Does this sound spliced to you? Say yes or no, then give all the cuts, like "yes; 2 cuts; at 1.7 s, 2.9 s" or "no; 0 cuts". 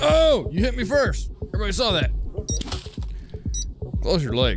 no; 0 cuts